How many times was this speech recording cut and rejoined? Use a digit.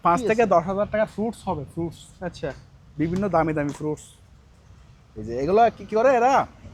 0